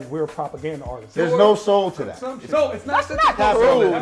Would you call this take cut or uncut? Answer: cut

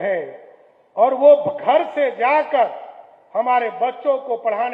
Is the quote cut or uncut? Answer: uncut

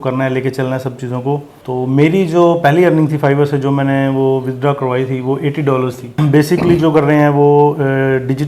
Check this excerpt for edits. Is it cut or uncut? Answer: cut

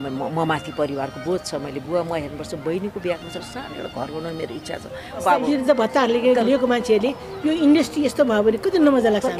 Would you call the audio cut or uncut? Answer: cut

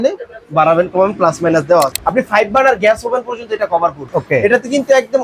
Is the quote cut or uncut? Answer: cut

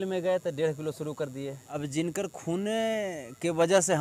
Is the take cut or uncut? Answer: cut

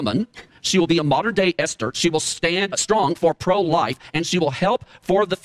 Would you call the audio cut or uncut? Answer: uncut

